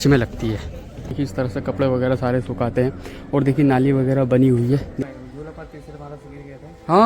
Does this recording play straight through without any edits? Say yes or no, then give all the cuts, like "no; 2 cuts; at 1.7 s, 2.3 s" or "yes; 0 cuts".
no; 2 cuts; at 1.1 s, 4.9 s